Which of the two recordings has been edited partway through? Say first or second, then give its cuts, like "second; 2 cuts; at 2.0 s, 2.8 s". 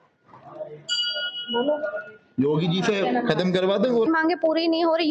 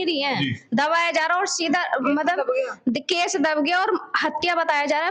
first; 1 cut; at 4.1 s